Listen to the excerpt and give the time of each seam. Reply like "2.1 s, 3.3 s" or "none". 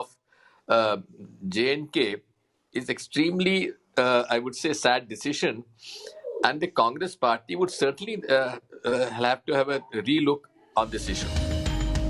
11.1 s